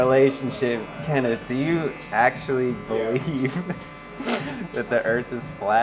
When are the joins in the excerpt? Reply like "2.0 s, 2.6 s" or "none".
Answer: none